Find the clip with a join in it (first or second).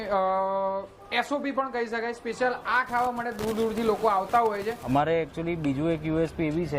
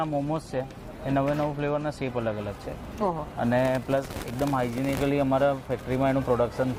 first